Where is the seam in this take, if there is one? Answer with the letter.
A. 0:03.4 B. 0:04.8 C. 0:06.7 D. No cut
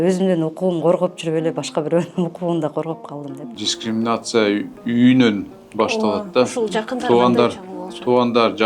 A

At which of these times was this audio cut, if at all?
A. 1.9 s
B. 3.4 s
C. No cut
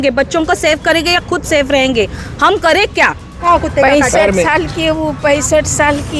B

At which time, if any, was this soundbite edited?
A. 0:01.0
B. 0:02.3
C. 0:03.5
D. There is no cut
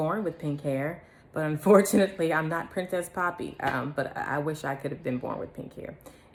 D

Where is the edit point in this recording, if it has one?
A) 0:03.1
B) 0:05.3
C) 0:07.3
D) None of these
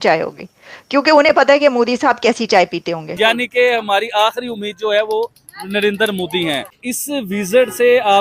A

